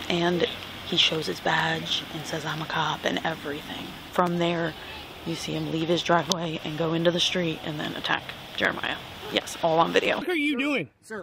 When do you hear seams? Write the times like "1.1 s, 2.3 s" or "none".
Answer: 4.0 s, 10.2 s